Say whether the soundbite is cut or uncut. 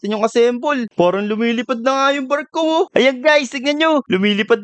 cut